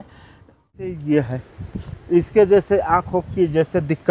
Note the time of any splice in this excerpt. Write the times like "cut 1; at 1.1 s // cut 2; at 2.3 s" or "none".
cut 1; at 1.0 s